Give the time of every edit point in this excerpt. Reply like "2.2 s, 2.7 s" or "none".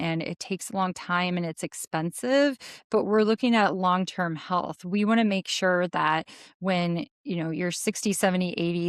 none